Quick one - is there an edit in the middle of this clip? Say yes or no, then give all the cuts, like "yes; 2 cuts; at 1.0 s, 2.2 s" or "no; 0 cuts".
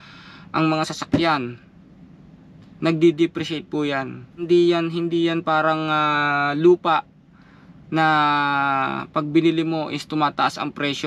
yes; 1 cut; at 4.5 s